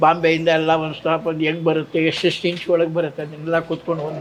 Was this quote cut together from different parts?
no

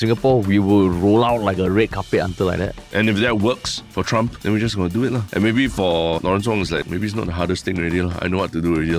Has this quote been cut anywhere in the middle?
yes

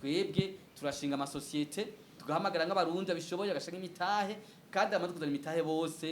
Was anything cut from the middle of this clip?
yes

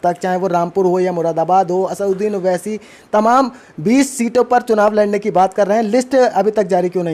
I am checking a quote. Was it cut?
no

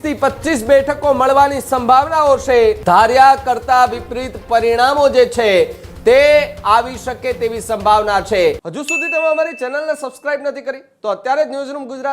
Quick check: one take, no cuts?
no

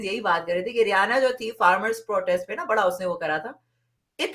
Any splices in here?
no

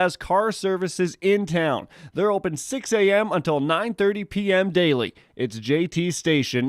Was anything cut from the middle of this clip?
yes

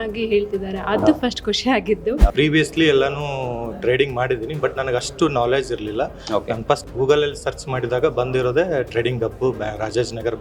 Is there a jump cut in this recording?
yes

